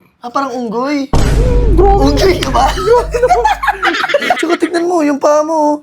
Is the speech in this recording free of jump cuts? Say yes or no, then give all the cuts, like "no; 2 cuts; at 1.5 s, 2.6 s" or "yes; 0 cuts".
yes; 0 cuts